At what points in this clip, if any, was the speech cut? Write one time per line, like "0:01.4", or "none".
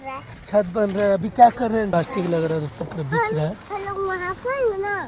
0:01.9

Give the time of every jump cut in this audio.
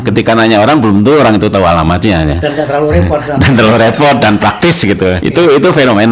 0:05.2

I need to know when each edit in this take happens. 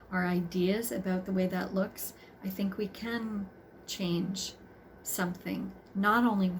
none

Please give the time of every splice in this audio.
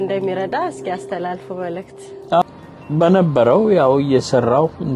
0:02.4

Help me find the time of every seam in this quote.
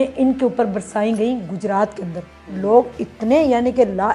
none

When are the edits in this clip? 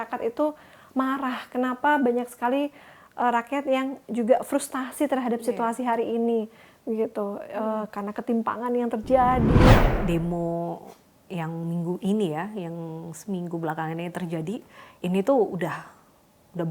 0:09.7

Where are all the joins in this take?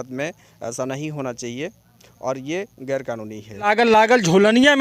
0:03.7

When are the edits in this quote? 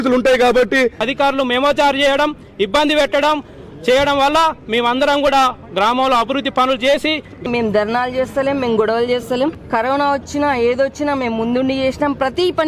0:01.0
0:07.4
0:09.6

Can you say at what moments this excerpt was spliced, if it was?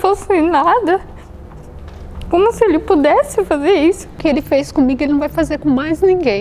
0:04.2

